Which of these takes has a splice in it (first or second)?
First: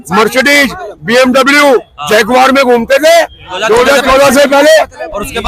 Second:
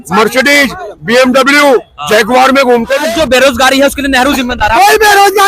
second